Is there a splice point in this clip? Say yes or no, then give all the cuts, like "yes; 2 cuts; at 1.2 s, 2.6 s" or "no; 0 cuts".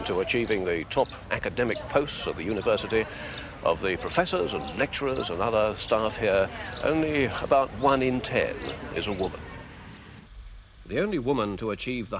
yes; 1 cut; at 5.3 s